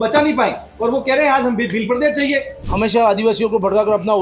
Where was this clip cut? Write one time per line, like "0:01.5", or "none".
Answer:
0:02.6